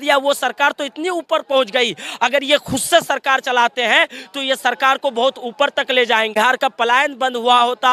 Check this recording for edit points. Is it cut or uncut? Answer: cut